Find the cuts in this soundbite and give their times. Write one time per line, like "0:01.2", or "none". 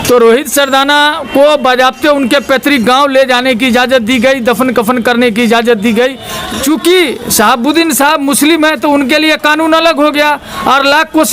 0:06.3

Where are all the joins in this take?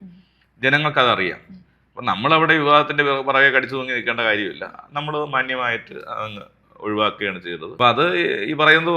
0:07.6

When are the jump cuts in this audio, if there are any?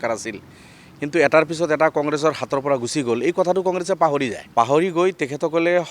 0:04.4

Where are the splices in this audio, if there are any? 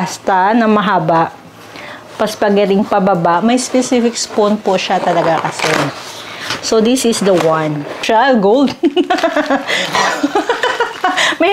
0:08.0

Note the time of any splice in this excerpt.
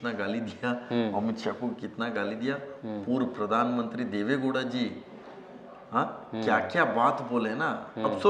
none

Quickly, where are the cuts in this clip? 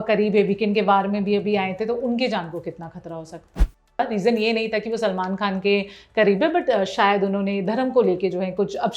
0:03.8

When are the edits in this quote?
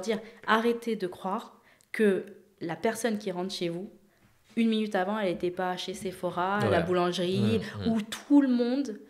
none

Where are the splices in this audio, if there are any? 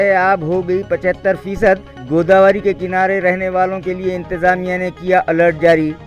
none

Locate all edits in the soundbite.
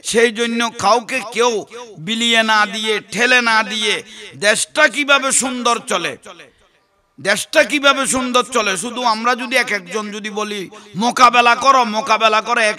none

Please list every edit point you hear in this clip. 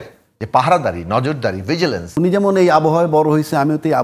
0:02.2

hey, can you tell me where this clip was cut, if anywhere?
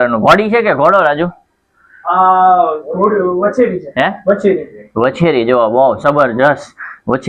none

